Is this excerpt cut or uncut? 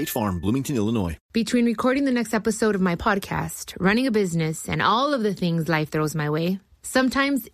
cut